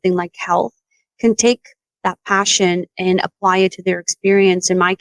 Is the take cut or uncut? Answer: uncut